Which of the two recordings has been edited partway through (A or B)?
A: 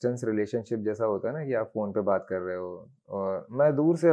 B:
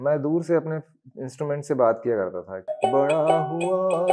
B